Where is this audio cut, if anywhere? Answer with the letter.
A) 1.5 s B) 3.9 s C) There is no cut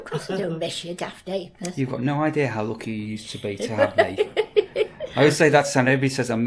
C